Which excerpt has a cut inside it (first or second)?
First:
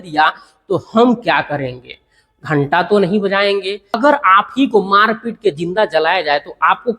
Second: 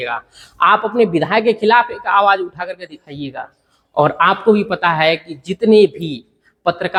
first